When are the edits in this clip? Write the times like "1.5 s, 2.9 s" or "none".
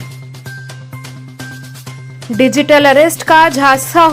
none